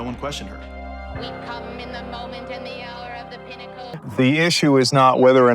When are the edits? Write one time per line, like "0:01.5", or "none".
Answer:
0:03.8